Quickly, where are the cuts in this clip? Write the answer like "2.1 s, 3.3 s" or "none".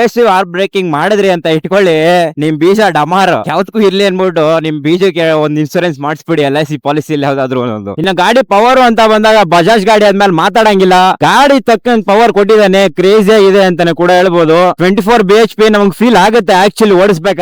8.0 s